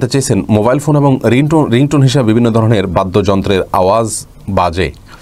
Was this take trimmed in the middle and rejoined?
no; 0 cuts

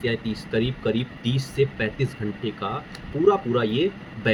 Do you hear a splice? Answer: no; 0 cuts

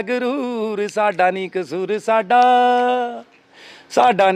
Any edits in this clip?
no; 0 cuts

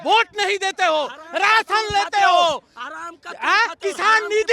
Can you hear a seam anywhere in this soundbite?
no; 0 cuts

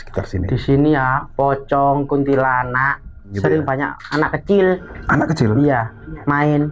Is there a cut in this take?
yes; 2 cuts; at 3.3 s, 4.9 s

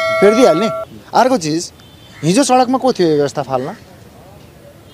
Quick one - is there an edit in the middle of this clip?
no; 0 cuts

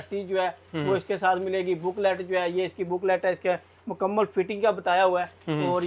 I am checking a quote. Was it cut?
no; 0 cuts

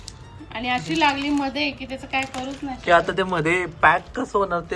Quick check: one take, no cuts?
yes; 0 cuts

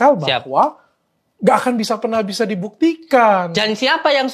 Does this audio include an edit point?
no; 0 cuts

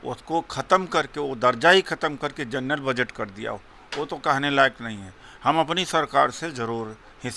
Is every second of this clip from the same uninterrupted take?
yes; 0 cuts

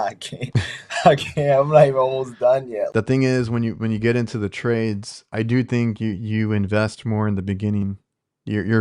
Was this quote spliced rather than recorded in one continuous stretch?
yes; 1 cut; at 2.9 s

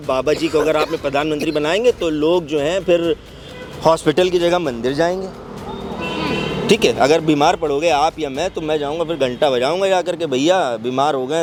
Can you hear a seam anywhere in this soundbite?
no; 0 cuts

